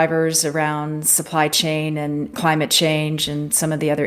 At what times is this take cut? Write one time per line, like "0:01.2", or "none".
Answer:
0:02.3